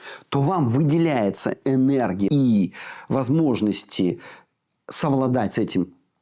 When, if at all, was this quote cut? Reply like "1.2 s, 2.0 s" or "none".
2.3 s